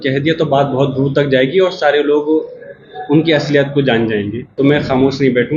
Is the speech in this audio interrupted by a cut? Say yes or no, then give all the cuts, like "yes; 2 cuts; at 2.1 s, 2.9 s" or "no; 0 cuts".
yes; 1 cut; at 4.4 s